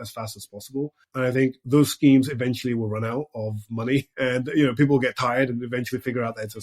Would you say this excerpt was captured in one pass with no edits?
no; 2 cuts; at 1.0 s, 4.1 s

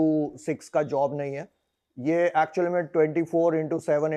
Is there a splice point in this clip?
no; 0 cuts

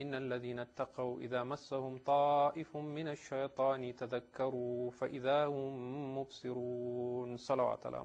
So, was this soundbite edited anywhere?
yes; 1 cut; at 2.7 s

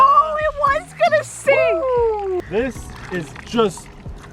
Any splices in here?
yes; 1 cut; at 2.4 s

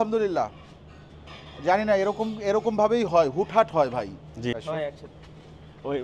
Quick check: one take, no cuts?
no; 1 cut; at 4.5 s

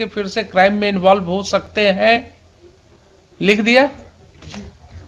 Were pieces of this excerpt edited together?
no; 0 cuts

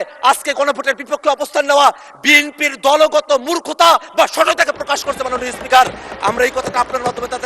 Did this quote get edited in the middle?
no; 0 cuts

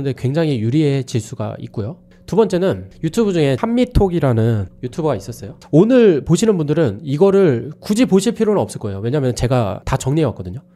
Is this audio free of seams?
no; 2 cuts; at 5.5 s, 9.8 s

